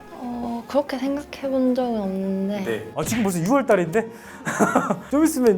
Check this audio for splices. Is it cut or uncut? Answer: cut